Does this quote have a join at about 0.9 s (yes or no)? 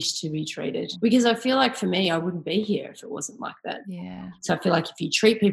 yes